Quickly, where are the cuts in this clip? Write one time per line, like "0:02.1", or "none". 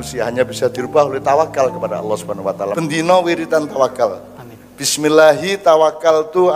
0:02.7